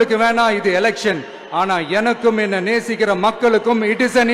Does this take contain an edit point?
no; 0 cuts

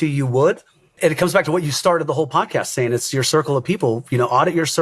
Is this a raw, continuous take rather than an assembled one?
no; 1 cut; at 0.9 s

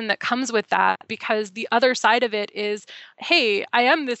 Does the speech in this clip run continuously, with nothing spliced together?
no; 1 cut; at 1.1 s

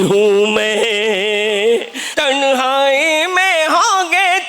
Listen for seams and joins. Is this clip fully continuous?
no; 1 cut; at 2.0 s

